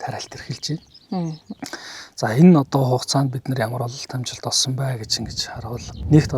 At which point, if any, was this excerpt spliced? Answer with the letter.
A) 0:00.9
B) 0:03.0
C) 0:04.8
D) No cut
D